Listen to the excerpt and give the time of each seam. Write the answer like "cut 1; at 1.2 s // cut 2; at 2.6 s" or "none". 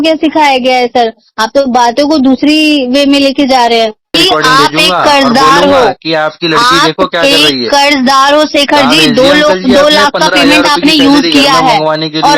cut 1; at 4.1 s